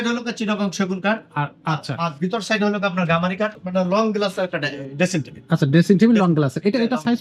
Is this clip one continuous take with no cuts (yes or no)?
no